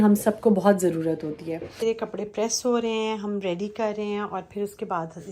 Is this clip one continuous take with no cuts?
no; 1 cut; at 1.8 s

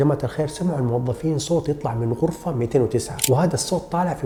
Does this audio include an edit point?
no; 0 cuts

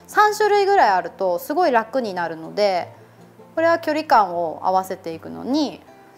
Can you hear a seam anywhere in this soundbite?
no; 0 cuts

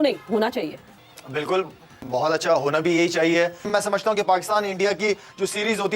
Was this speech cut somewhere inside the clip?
yes; 1 cut; at 3.7 s

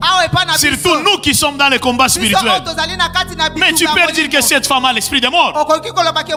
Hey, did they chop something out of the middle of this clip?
no; 0 cuts

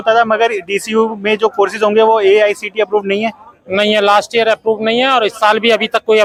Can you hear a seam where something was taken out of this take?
no; 0 cuts

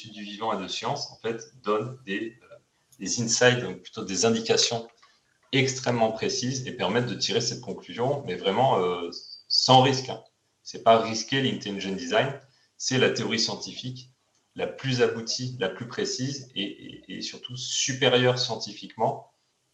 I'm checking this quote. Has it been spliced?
no; 0 cuts

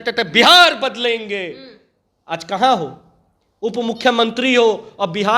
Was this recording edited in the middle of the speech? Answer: no; 0 cuts

